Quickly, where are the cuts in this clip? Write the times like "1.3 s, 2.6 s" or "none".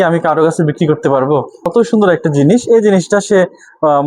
1.7 s